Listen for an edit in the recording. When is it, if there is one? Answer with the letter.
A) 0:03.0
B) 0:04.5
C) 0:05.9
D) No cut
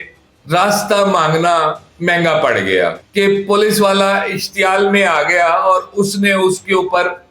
A